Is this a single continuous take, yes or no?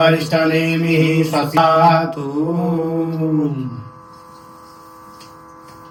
yes